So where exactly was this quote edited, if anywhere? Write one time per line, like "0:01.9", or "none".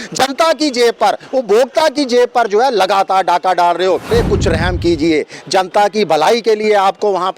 0:04.0